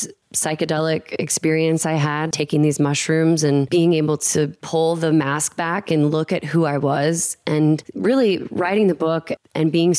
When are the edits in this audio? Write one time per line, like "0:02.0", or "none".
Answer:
0:02.3
0:07.9